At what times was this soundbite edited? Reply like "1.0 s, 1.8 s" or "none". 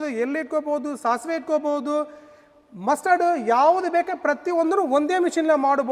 none